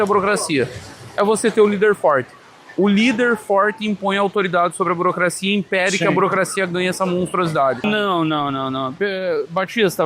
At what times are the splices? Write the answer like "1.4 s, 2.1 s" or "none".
7.8 s